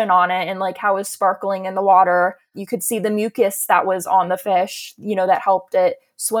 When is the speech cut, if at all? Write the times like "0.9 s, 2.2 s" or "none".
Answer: 2.5 s